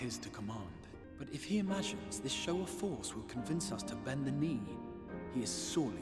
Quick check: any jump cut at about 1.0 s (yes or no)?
yes